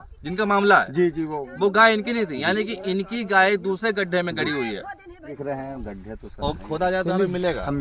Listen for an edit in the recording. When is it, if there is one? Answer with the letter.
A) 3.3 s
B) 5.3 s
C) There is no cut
B